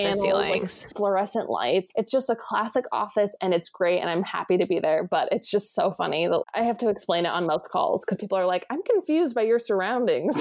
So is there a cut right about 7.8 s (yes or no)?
no